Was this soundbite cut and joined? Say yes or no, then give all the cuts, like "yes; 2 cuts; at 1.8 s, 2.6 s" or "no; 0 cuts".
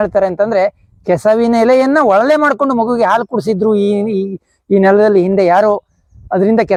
no; 0 cuts